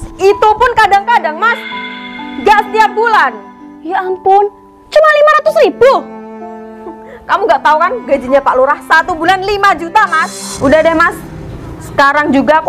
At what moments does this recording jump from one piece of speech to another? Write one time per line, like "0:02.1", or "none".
0:10.4